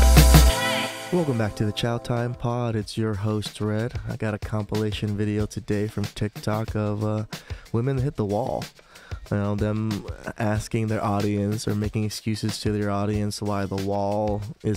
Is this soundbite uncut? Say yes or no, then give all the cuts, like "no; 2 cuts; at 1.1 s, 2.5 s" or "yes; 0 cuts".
no; 1 cut; at 1.0 s